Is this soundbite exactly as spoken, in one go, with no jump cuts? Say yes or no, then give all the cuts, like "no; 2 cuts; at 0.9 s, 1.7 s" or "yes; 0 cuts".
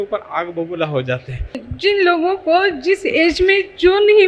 no; 1 cut; at 1.7 s